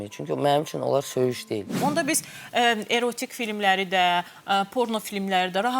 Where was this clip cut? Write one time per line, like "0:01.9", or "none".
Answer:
0:01.7